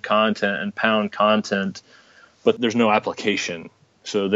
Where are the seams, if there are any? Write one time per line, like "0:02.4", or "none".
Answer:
0:02.6